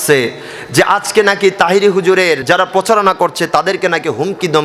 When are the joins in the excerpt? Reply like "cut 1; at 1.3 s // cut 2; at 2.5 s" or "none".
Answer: cut 1; at 2.4 s